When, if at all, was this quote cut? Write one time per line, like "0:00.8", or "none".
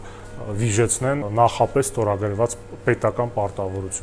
0:01.3